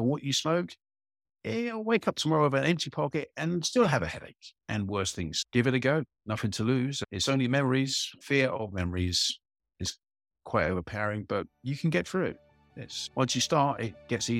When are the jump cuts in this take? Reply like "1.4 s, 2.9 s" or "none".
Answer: 5.4 s, 7.1 s, 8.1 s